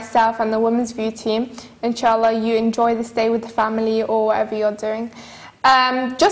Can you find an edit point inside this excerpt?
no; 0 cuts

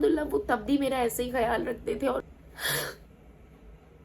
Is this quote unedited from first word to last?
no; 1 cut; at 2.2 s

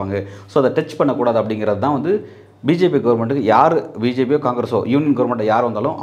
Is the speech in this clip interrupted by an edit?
no; 0 cuts

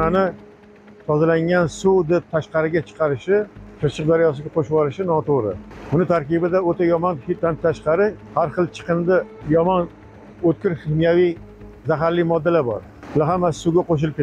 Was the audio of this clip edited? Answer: yes; 6 cuts; at 3.6 s, 5.7 s, 7.4 s, 8.2 s, 9.4 s, 12.9 s

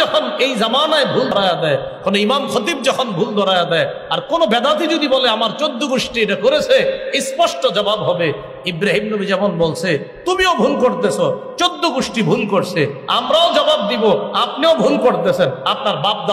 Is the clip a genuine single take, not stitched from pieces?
no; 1 cut; at 1.3 s

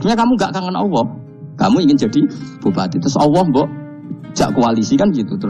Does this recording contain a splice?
no; 0 cuts

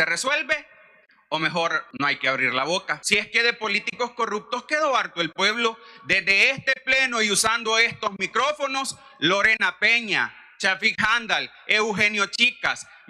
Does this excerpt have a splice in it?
yes; 2 cuts; at 1.8 s, 3.0 s

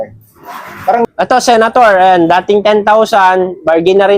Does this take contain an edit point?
yes; 1 cut; at 1.0 s

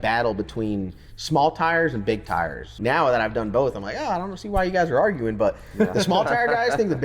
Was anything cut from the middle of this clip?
yes; 1 cut; at 2.6 s

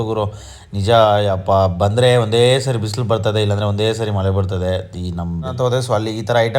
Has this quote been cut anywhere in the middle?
yes; 1 cut; at 5.5 s

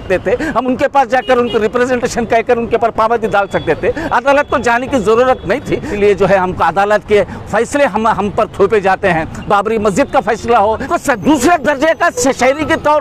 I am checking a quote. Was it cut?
yes; 2 cuts; at 5.9 s, 10.8 s

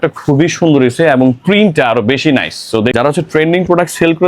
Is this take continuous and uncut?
no; 1 cut; at 2.9 s

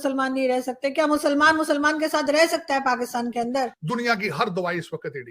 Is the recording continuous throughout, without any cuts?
no; 1 cut; at 3.8 s

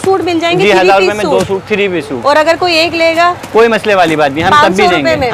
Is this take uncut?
yes; 0 cuts

